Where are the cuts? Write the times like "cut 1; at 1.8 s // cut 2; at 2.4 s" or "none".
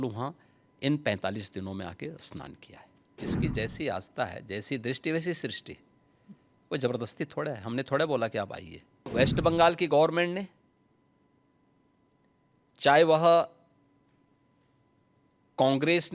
cut 1; at 3.1 s // cut 2; at 9.1 s